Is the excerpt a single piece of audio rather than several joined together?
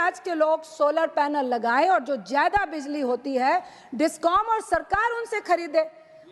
yes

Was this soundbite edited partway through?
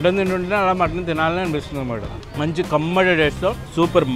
no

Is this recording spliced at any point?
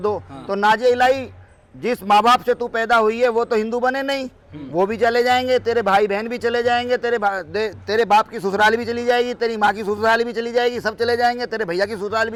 no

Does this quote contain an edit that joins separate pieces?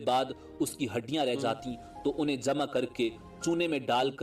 no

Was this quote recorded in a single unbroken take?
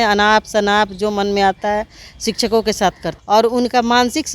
no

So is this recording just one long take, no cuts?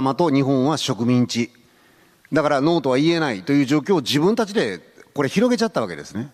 yes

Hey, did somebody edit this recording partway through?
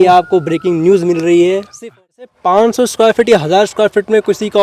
yes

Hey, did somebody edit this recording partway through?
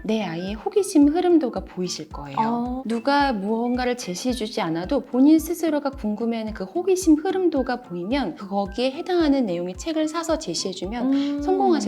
yes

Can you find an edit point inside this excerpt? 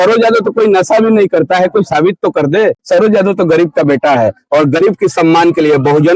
yes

